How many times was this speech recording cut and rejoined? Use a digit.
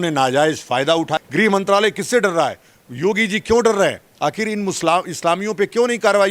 1